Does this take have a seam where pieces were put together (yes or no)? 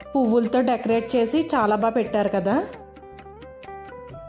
no